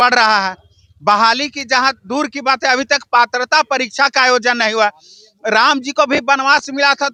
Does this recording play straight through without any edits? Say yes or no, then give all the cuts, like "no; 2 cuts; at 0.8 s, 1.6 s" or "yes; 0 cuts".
yes; 0 cuts